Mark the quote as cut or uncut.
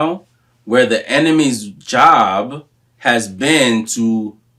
uncut